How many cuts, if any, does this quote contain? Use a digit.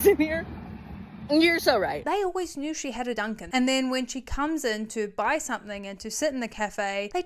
2